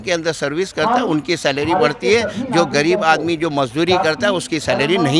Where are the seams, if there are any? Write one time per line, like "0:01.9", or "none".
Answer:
none

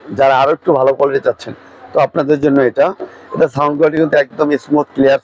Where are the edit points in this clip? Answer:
none

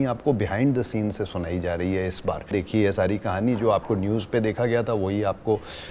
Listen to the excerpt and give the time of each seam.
0:02.5

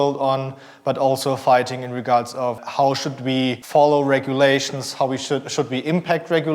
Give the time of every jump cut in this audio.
0:02.6
0:03.6

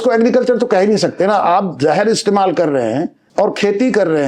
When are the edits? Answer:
0:03.2

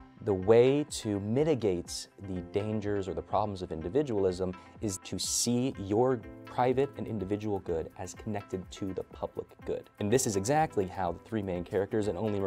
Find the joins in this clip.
0:05.0
0:10.0

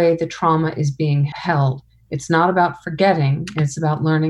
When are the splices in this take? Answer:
0:01.3

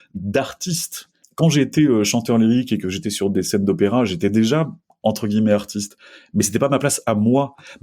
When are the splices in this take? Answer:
0:01.2

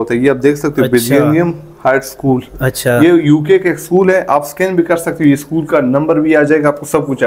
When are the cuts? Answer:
none

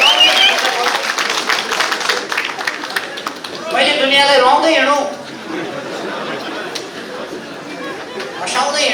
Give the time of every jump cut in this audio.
none

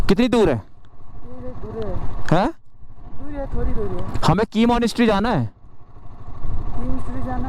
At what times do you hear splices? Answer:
none

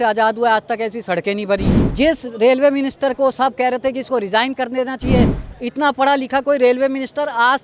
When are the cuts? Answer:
0:01.8

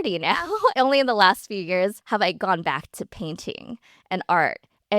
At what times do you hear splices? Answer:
0:00.7
0:02.0

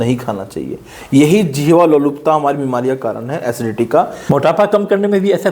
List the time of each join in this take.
0:03.9

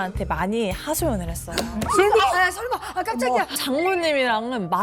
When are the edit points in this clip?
0:03.6

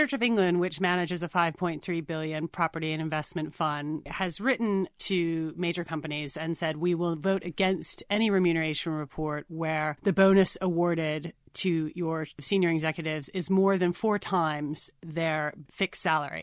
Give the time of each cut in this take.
0:04.1
0:05.0
0:10.0
0:12.4
0:15.6

